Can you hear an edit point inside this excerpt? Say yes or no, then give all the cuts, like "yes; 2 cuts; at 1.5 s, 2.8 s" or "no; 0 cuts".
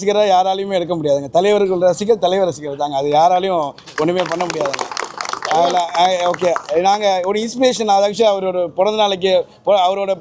no; 0 cuts